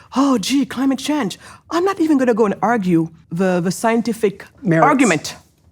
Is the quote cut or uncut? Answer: cut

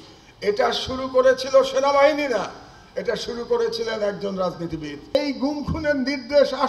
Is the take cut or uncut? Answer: cut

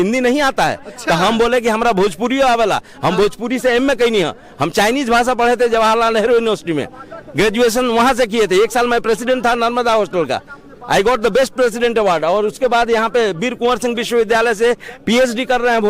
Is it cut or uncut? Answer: uncut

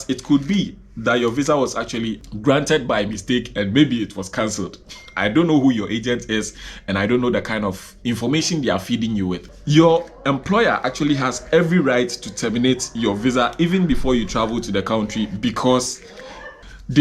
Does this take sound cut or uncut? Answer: uncut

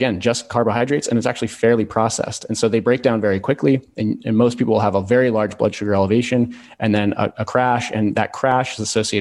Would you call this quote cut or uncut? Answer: uncut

